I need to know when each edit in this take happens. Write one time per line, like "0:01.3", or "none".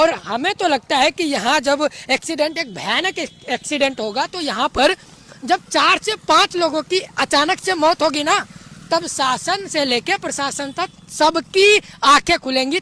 none